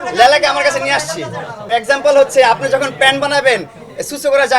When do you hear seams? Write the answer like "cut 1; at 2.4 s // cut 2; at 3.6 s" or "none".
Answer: cut 1; at 1.5 s